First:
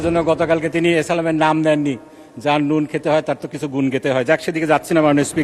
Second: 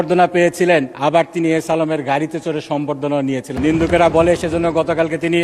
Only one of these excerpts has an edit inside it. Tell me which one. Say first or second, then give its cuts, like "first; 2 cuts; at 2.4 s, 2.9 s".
second; 2 cuts; at 0.9 s, 3.5 s